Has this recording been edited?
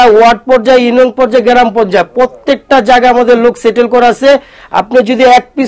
no; 0 cuts

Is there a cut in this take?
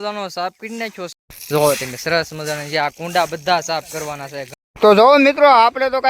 yes; 2 cuts; at 1.1 s, 4.5 s

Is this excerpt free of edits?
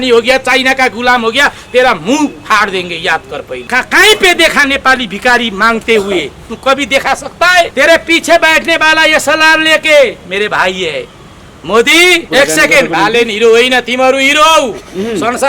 no; 3 cuts; at 3.5 s, 7.7 s, 12.3 s

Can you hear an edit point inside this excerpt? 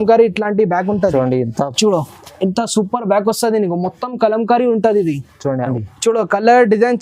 yes; 1 cut; at 5.7 s

